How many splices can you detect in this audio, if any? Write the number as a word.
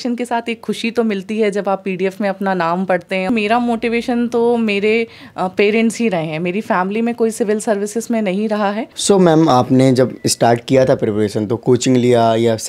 two